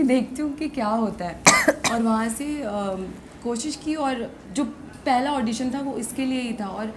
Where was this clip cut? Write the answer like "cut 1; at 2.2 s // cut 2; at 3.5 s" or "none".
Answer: none